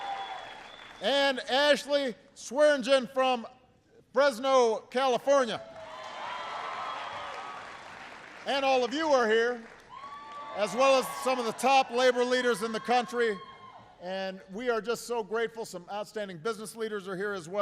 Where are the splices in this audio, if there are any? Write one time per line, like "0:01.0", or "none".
0:02.3